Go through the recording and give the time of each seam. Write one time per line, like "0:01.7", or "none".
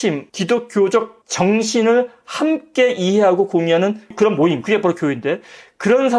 0:04.1